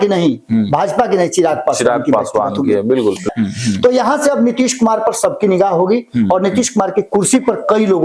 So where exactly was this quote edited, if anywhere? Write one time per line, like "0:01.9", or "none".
0:03.3